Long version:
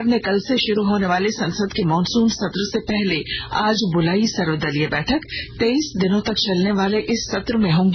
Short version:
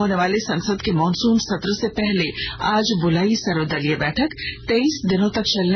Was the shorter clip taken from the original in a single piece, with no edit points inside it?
yes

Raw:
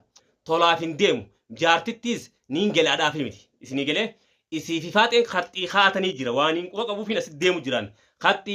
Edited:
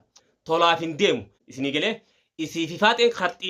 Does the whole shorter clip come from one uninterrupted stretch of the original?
no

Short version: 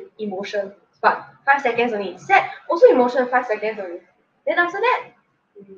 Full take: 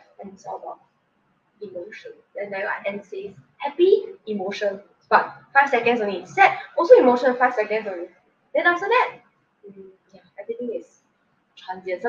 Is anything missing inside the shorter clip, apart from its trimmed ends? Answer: no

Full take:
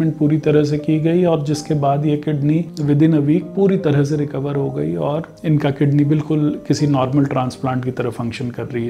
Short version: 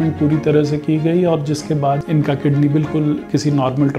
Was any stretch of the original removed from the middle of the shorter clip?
yes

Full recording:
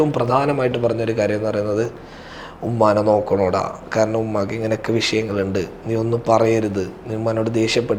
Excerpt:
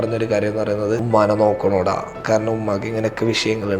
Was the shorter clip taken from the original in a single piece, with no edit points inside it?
no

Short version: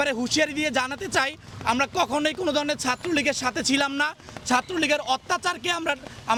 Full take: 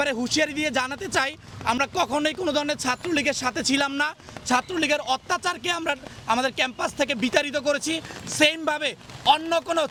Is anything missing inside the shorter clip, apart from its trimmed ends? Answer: no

